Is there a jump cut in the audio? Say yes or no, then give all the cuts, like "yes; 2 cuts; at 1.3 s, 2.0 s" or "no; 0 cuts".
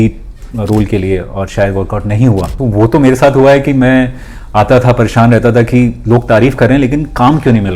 yes; 1 cut; at 2.5 s